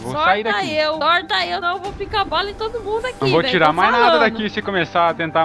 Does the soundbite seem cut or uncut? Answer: cut